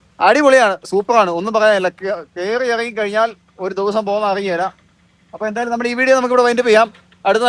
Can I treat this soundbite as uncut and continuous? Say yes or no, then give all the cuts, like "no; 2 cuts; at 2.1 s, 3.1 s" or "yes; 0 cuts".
yes; 0 cuts